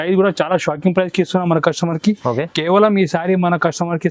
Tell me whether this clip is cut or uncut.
uncut